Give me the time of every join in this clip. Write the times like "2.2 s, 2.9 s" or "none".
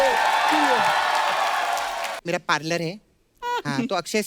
2.1 s

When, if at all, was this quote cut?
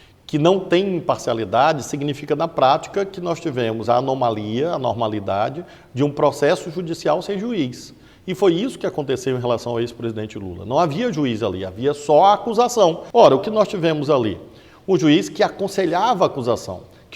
13.0 s

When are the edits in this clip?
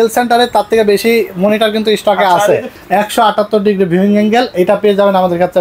2.7 s

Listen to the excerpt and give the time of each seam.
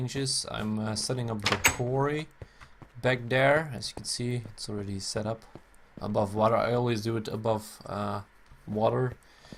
none

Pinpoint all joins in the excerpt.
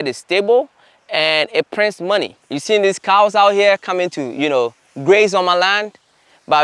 2.4 s

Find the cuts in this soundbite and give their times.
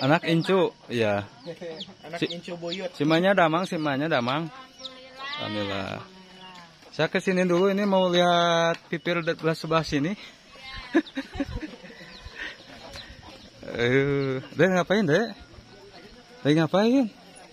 none

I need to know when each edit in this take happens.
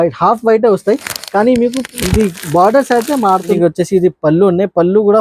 3.6 s

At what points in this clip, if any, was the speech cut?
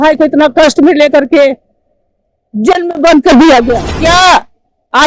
3.9 s

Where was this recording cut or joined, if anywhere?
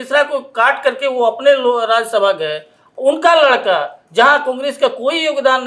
none

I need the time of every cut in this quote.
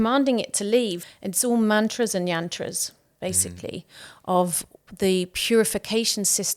1.0 s

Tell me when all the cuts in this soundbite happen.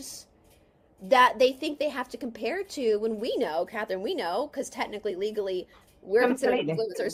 none

